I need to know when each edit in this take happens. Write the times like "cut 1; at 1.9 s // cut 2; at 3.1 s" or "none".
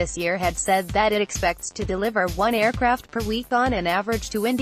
none